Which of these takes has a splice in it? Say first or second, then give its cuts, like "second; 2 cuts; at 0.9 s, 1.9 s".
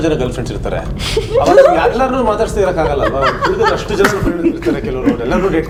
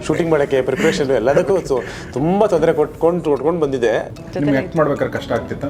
second; 1 cut; at 4.1 s